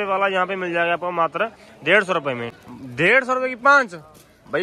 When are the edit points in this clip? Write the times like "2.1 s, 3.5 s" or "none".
2.5 s

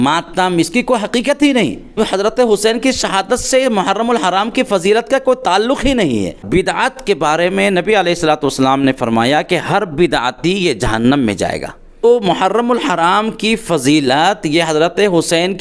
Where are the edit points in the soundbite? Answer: 1.9 s, 6.4 s, 12.0 s

